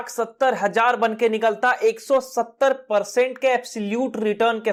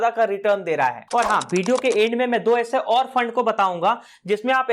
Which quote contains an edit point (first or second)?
second